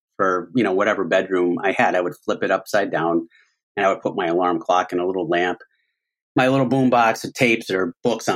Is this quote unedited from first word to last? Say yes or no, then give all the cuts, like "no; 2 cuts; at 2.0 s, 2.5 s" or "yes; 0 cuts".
yes; 0 cuts